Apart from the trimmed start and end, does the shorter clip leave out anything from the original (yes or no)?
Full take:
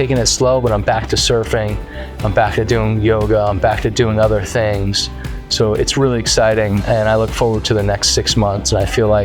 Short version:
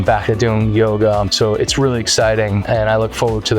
yes